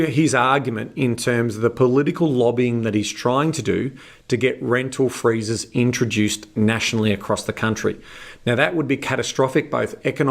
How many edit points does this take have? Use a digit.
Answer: 0